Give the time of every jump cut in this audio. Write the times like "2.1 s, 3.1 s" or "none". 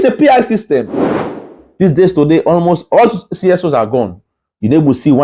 1.4 s